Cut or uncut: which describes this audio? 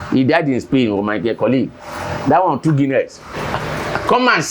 uncut